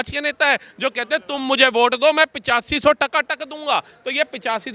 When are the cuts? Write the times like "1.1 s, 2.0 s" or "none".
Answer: none